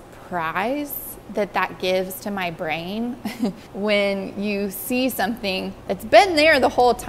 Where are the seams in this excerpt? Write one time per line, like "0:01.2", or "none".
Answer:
0:03.7
0:05.7

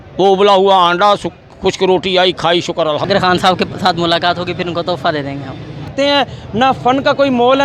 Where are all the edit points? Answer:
0:03.1
0:05.9

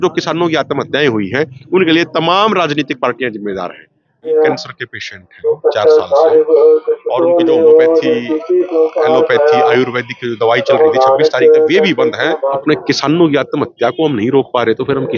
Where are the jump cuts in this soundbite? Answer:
0:04.3
0:12.6

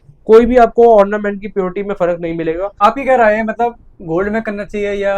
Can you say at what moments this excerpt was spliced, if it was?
0:02.8

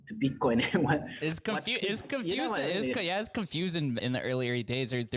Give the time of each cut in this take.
0:01.1
0:04.0

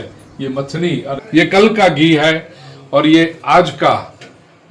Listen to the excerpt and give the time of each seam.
0:01.2

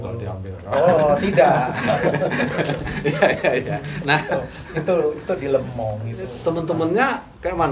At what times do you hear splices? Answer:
none

